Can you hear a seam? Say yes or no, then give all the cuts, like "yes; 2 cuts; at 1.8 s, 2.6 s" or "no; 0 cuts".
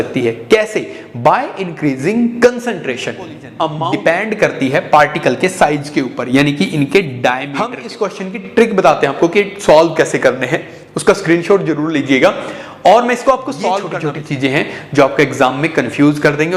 yes; 3 cuts; at 3.6 s, 7.8 s, 14.0 s